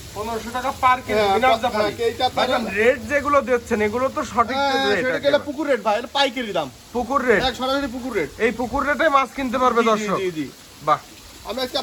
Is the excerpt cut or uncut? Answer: uncut